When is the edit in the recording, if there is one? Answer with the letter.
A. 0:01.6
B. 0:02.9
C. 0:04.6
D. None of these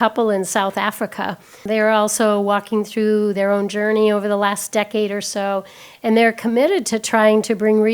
A